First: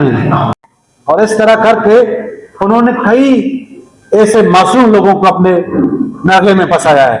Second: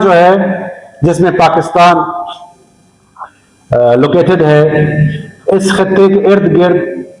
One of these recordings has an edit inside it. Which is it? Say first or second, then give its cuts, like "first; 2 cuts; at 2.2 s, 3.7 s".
first; 1 cut; at 1.2 s